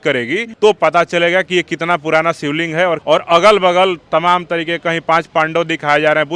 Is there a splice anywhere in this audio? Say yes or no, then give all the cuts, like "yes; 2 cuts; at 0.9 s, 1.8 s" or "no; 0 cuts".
yes; 1 cut; at 3.0 s